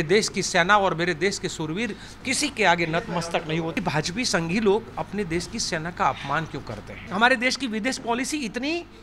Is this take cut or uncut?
cut